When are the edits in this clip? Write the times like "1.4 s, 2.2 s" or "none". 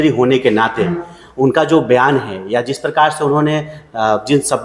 none